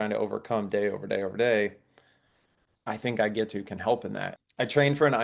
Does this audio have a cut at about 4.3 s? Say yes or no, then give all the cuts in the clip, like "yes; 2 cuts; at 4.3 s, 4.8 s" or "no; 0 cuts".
yes; 1 cut; at 4.3 s